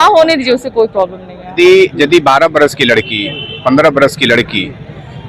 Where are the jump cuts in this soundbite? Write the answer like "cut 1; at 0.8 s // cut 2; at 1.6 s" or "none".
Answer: cut 1; at 1.5 s